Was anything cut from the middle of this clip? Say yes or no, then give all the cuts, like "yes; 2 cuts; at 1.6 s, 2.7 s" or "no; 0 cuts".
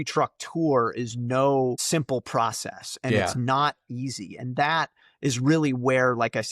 yes; 1 cut; at 1.8 s